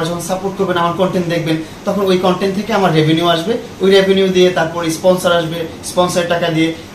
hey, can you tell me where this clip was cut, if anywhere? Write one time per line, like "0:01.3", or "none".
none